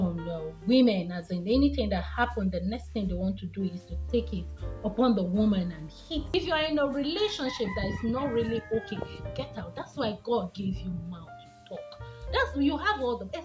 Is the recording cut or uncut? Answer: cut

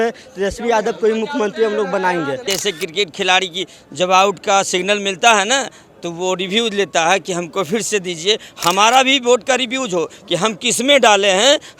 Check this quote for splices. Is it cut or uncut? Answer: cut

